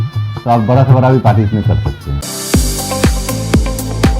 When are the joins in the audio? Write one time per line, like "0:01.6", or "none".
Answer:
0:02.2